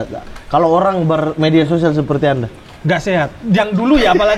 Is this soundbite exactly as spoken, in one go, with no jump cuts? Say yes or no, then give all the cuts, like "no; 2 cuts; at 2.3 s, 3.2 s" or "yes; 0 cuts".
yes; 0 cuts